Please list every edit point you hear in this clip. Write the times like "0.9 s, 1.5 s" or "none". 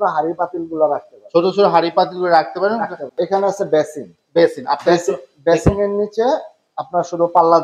3.1 s